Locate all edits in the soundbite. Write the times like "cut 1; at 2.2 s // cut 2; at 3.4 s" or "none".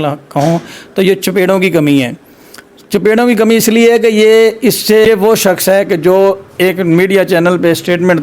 cut 1; at 5.0 s